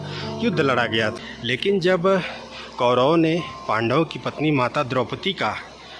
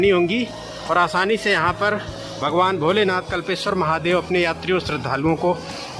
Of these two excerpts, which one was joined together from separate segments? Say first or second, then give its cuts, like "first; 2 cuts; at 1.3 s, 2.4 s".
first; 1 cut; at 1.2 s